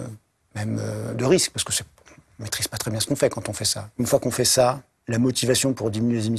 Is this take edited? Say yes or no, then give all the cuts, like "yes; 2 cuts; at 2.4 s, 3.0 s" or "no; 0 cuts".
yes; 2 cuts; at 3.9 s, 4.9 s